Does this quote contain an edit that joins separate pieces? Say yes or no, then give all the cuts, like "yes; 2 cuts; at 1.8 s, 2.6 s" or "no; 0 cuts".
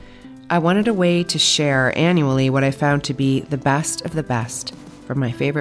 no; 0 cuts